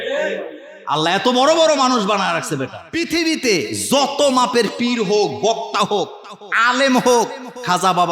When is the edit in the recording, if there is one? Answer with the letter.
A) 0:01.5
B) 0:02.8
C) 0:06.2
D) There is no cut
B